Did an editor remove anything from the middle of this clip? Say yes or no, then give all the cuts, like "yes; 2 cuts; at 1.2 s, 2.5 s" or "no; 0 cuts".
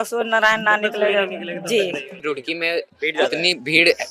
yes; 1 cut; at 2.2 s